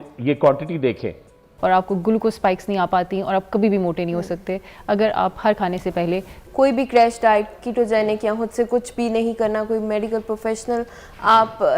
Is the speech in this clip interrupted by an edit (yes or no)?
yes